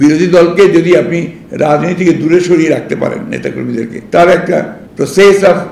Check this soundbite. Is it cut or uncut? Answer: cut